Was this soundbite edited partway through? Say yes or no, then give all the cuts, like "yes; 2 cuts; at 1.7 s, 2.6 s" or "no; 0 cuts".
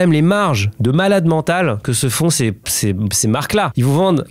no; 0 cuts